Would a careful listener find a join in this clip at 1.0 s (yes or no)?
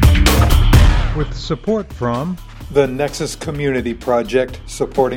yes